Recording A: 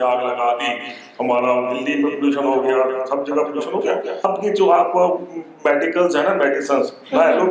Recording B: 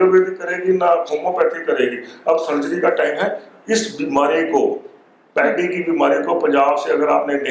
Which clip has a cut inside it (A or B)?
A